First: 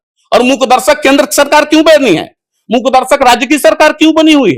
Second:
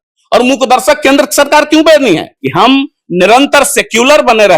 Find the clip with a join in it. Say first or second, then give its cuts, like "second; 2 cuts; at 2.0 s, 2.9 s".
second; 1 cut; at 2.4 s